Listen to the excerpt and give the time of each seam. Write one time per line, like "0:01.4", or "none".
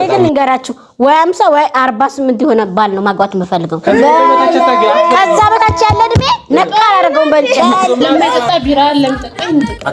0:08.4